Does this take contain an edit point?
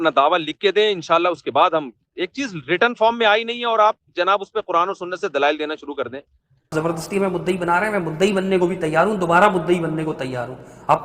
yes; 1 cut; at 6.7 s

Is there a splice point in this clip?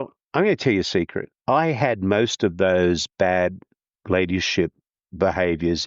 yes; 1 cut; at 1.3 s

